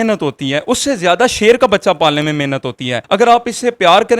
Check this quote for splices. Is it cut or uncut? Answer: cut